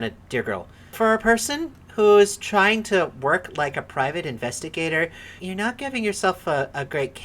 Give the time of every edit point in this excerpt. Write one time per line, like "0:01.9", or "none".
0:00.9
0:05.4